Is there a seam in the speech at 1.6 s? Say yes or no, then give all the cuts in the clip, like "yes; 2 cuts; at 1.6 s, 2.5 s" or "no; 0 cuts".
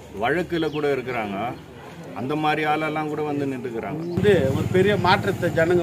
no; 1 cut; at 4.2 s